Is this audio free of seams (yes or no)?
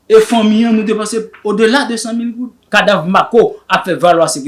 no